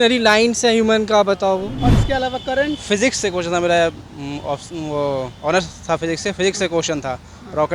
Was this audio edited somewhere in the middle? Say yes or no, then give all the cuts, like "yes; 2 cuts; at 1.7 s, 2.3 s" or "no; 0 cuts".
yes; 1 cut; at 1.7 s